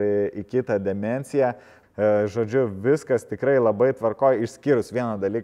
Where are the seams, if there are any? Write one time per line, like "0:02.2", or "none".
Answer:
0:01.7